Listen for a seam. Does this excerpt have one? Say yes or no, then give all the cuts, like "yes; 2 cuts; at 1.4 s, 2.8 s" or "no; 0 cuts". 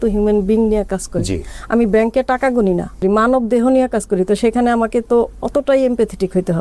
yes; 1 cut; at 3.0 s